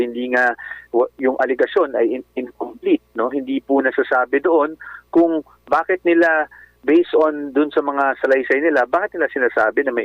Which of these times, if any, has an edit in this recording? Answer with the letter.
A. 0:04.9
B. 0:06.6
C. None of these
C